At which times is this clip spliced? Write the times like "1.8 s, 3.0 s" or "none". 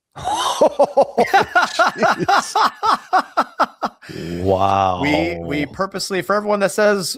none